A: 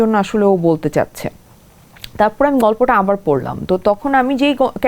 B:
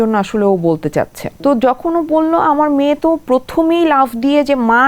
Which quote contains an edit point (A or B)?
B